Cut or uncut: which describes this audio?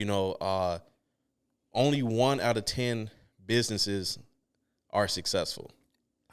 uncut